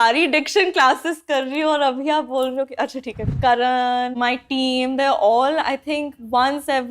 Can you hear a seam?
yes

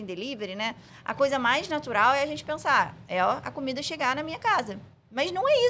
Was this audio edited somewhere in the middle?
no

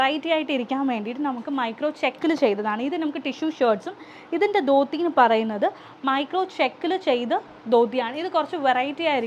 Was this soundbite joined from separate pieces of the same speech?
no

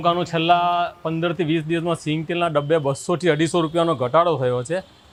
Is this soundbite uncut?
yes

